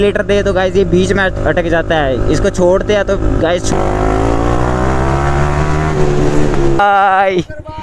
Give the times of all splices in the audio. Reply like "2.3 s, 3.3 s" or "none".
3.7 s, 6.8 s

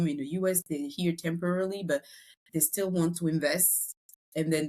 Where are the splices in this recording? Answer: none

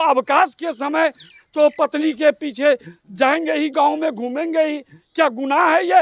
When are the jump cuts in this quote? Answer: none

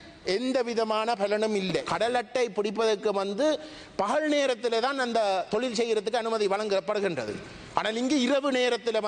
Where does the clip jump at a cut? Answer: 1.9 s

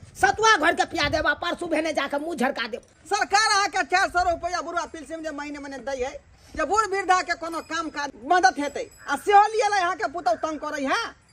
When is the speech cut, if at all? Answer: 2.9 s, 8.1 s

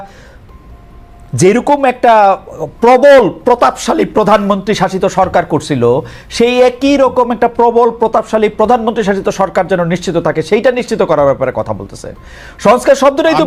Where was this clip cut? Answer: none

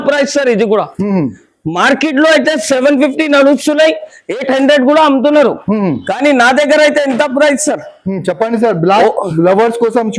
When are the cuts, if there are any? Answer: none

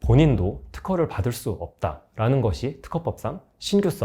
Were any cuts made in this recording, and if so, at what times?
none

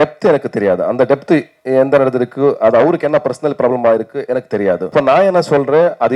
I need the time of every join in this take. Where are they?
4.9 s

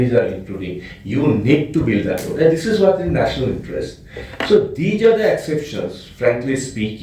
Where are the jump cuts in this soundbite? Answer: none

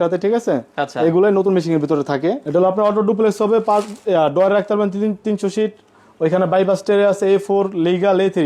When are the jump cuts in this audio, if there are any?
2.4 s

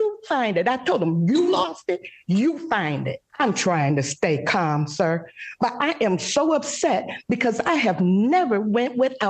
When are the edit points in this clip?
3.2 s

